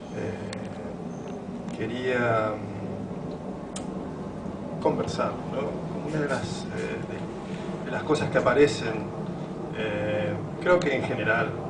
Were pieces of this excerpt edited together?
yes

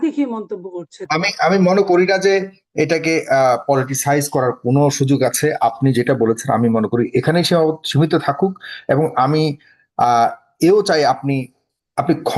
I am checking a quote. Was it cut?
yes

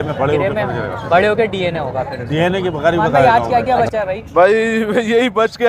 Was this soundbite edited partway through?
yes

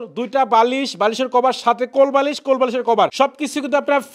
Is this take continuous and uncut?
no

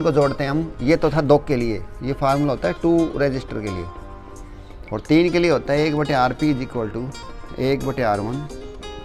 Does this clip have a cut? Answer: no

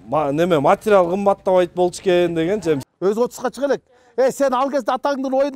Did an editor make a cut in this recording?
yes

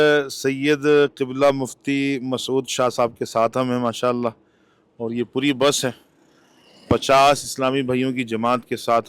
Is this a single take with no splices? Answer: yes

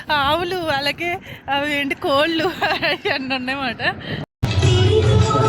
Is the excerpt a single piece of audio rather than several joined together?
no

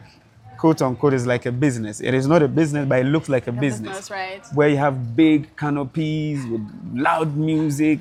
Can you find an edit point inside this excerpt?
no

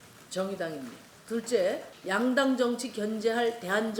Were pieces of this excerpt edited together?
yes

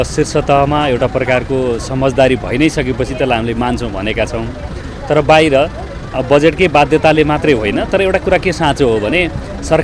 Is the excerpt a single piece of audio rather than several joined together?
yes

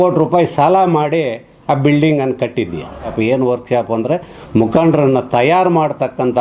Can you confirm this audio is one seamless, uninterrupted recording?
no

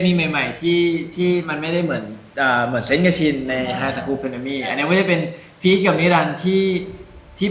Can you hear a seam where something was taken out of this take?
no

